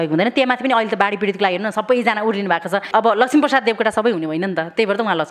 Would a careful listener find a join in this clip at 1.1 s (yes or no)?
no